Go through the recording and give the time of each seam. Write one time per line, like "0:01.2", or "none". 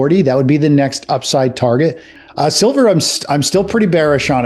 0:02.1